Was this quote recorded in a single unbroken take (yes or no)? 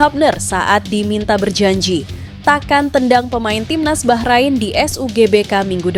yes